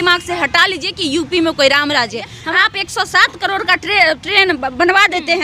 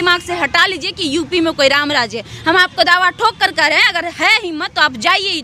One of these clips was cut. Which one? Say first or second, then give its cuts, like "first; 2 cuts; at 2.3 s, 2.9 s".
first; 1 cut; at 2.4 s